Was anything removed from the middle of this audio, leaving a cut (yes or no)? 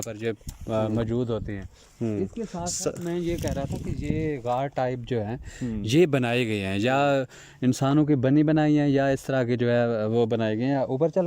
no